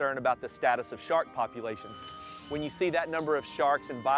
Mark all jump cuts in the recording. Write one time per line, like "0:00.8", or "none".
0:02.3